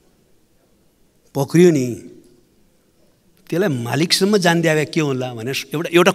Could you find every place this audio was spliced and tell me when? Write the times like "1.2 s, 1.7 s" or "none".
none